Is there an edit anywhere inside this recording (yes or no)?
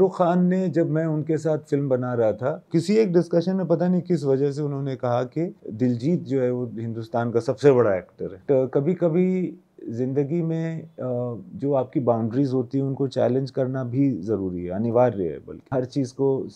yes